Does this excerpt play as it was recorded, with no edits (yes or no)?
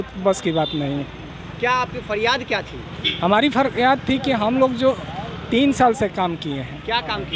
yes